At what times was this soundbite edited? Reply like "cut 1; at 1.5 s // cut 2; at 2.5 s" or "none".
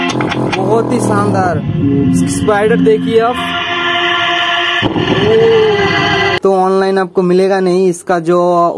cut 1; at 6.4 s